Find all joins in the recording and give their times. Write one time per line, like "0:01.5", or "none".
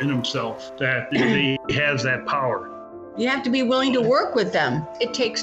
0:00.9
0:03.0